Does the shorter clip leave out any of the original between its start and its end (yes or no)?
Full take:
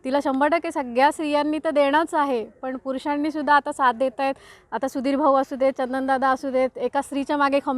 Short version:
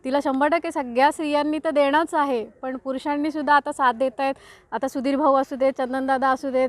no